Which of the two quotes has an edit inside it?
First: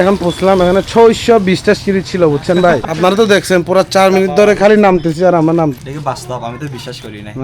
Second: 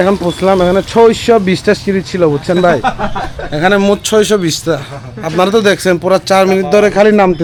first; 2 cuts; at 2.8 s, 5.8 s

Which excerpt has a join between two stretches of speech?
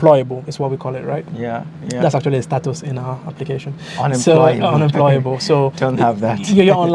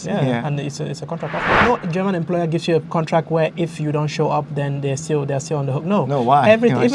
second; 1 cut; at 1.5 s

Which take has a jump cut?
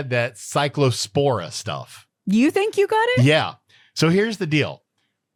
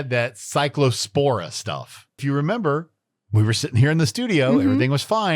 second; 1 cut; at 2.2 s

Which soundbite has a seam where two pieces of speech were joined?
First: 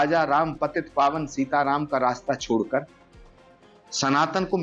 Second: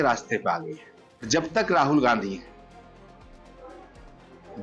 second; 1 cut; at 1.3 s

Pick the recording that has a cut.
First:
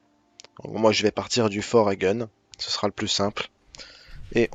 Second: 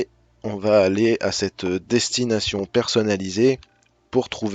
first; 1 cut; at 1.8 s

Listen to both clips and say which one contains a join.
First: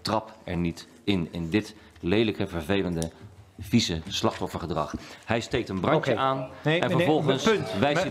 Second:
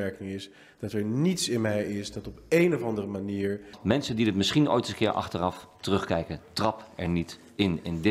second; 1 cut; at 3.8 s

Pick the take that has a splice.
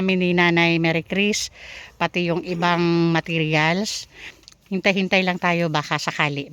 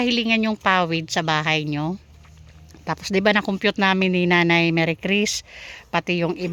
first; 1 cut; at 4.3 s

